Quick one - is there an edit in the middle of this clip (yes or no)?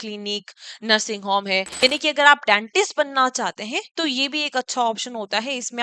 yes